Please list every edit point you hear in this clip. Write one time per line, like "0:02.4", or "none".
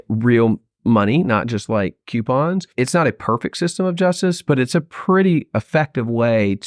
0:02.7